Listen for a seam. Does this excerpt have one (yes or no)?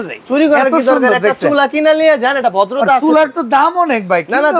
no